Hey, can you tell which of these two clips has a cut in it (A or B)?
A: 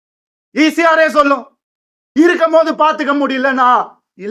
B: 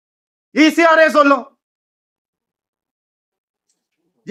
A